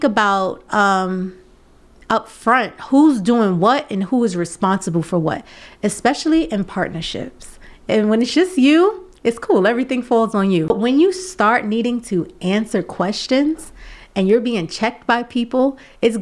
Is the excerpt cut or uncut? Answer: cut